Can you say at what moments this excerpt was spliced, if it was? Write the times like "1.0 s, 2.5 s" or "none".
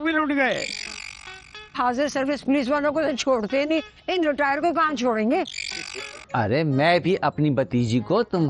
6.2 s